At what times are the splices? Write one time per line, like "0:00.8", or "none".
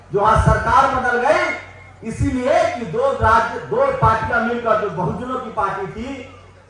none